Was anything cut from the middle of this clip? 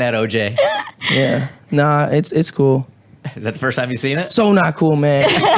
yes; 1 cut; at 3.1 s

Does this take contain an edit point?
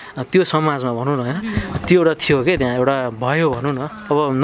no; 0 cuts

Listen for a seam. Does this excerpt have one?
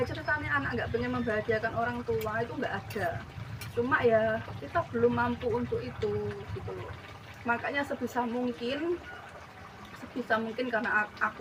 no; 0 cuts

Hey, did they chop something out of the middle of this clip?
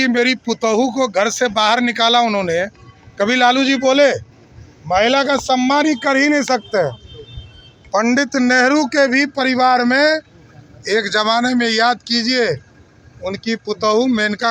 no; 0 cuts

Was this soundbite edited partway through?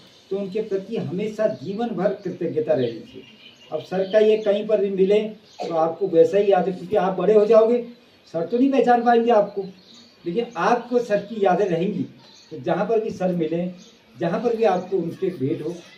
no; 0 cuts

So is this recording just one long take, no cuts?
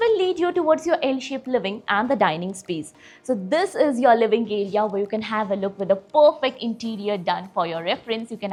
yes; 0 cuts

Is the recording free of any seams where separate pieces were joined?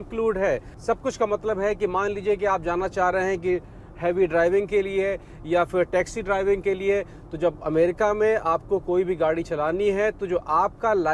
yes; 0 cuts

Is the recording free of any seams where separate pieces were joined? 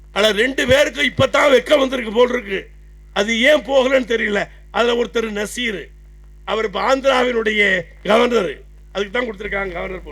yes; 0 cuts

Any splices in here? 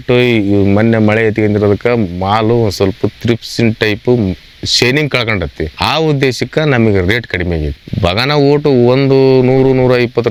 no; 0 cuts

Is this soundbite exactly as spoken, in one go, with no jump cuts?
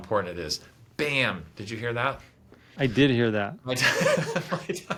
yes; 0 cuts

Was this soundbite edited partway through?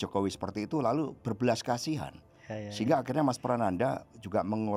no; 0 cuts

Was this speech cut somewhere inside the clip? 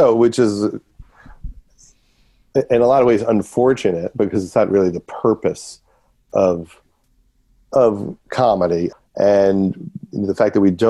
yes; 1 cut; at 8.9 s

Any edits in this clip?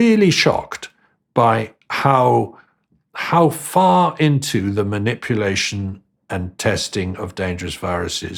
no; 0 cuts

